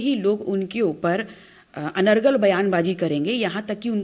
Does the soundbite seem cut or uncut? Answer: uncut